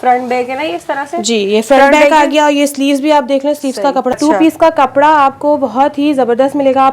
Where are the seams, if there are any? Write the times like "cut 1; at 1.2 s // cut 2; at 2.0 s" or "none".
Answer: cut 1; at 4.2 s